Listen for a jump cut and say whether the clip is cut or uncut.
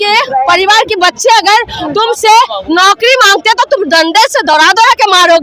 uncut